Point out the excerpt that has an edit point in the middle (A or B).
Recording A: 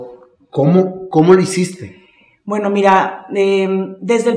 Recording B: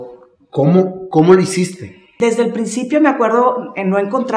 B